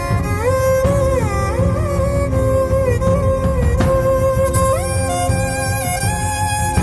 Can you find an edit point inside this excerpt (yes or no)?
no